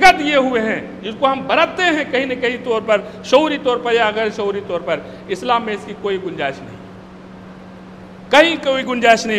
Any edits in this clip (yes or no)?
no